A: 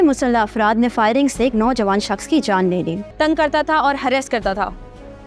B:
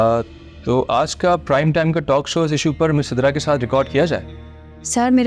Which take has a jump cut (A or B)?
A